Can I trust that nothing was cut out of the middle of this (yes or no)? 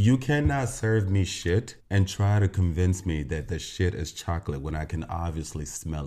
yes